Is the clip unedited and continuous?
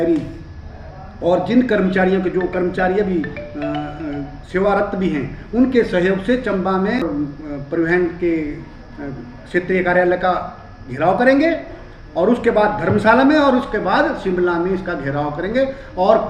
no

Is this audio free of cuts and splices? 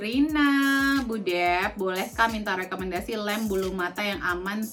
yes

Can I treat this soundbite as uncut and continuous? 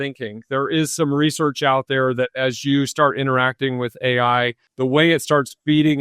no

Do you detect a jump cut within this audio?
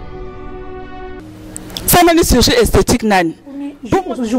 no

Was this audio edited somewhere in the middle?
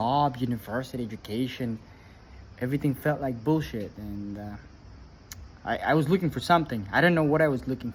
no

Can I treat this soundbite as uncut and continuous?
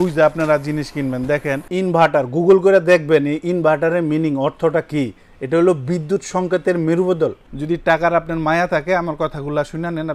no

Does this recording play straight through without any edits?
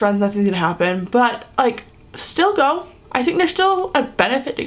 yes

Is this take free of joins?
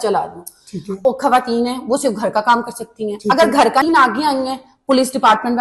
no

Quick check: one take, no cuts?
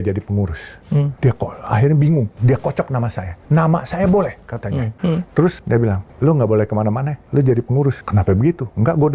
no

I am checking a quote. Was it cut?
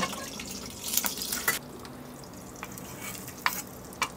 yes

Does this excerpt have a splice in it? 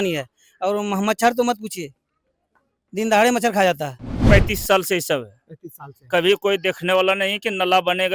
yes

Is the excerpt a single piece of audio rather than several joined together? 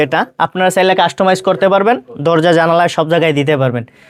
yes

